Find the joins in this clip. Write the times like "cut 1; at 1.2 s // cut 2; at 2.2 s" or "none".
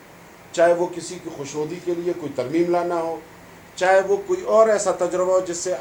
none